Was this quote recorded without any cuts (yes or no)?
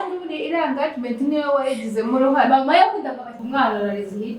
no